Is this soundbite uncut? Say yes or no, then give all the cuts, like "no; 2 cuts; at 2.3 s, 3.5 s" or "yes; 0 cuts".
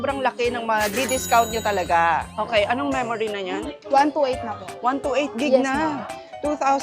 no; 1 cut; at 2.3 s